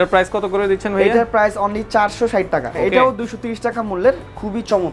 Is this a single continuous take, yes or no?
no